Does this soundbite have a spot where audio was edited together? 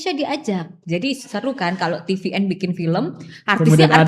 no; 0 cuts

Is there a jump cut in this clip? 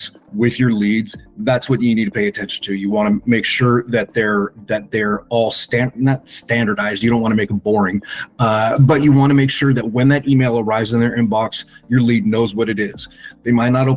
no; 0 cuts

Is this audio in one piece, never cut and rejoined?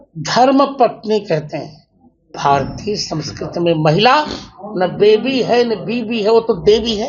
no; 1 cut; at 2.3 s

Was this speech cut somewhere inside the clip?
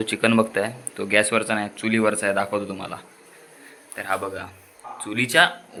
no; 0 cuts

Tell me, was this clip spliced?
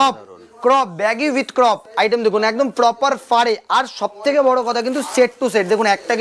no; 0 cuts

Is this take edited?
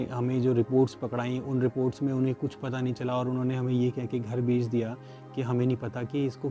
no; 0 cuts

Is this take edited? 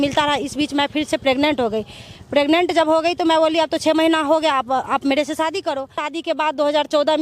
yes; 1 cut; at 6.1 s

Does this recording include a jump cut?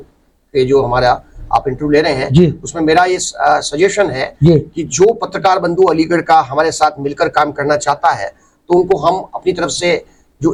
no; 0 cuts

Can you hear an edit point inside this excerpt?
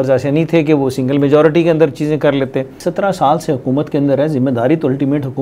yes; 1 cut; at 2.8 s

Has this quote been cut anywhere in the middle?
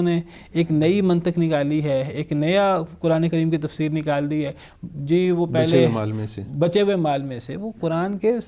no; 0 cuts

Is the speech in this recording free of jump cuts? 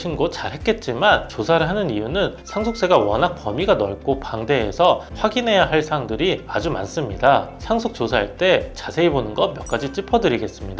yes; 0 cuts

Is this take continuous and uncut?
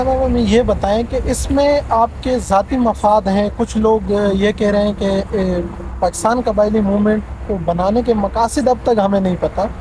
yes; 0 cuts

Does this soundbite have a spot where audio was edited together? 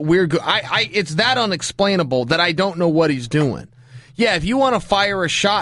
no; 0 cuts

